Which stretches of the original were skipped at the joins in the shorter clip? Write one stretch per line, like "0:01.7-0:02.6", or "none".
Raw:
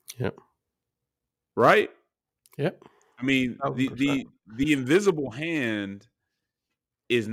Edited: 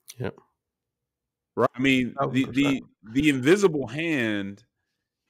0:01.7-0:03.1